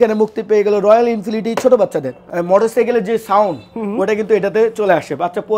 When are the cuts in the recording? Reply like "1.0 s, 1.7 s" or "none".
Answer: 2.2 s